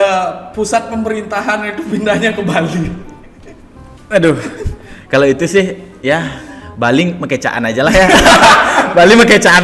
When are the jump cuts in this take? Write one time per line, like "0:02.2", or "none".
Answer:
none